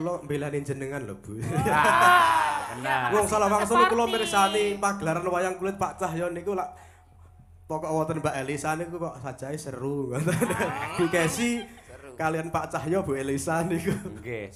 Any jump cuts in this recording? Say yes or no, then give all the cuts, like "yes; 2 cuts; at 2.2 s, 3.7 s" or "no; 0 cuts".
no; 0 cuts